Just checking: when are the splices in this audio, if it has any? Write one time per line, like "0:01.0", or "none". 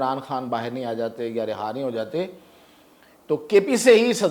none